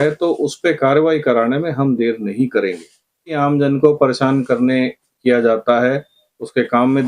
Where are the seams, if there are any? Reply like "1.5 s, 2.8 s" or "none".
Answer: 3.4 s